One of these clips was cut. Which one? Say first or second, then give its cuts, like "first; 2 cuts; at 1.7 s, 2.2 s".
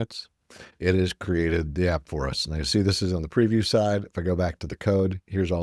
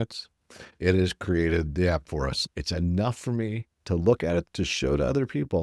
second; 2 cuts; at 2.5 s, 4.4 s